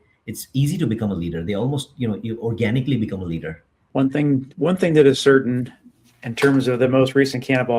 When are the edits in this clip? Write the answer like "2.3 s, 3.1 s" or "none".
3.9 s